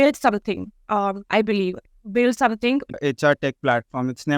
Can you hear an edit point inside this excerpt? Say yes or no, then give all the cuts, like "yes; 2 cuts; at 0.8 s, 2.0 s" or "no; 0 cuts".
yes; 1 cut; at 2.9 s